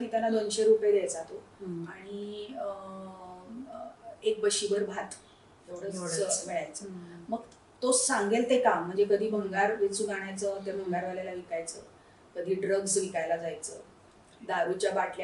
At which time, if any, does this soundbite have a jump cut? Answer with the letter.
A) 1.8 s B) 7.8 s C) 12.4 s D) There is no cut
D